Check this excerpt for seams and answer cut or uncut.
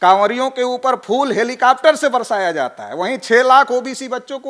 uncut